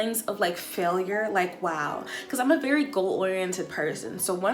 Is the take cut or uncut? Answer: uncut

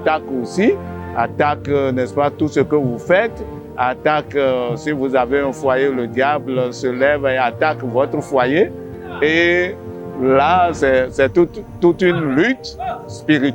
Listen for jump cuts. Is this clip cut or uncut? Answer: uncut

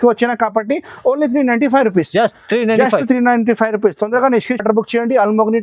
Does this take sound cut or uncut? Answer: uncut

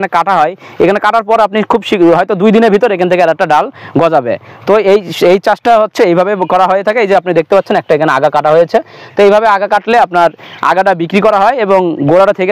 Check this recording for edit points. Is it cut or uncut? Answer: uncut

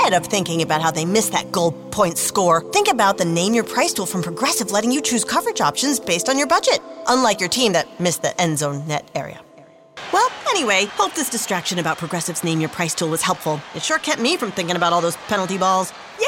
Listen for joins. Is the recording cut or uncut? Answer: uncut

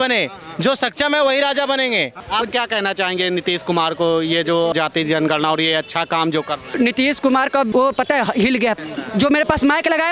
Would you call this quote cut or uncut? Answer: cut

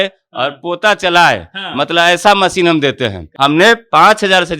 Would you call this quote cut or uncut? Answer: cut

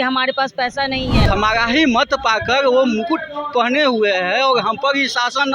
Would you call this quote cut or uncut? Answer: cut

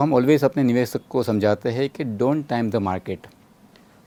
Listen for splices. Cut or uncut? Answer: uncut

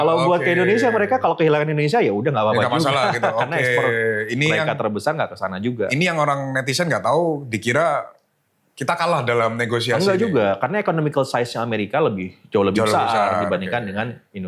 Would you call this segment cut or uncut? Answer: uncut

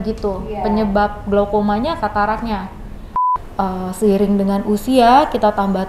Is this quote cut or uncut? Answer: cut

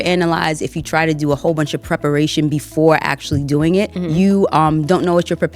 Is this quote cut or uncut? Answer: cut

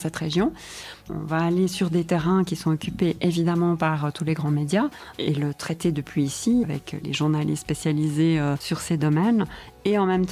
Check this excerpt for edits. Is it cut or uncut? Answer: cut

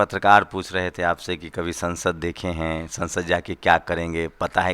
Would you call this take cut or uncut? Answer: uncut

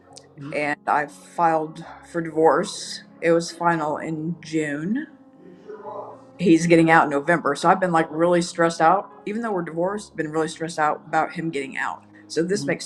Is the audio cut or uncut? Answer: uncut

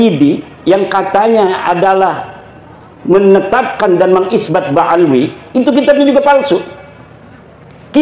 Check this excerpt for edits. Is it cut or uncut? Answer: uncut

